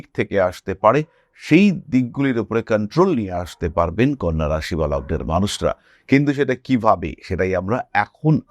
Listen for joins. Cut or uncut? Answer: uncut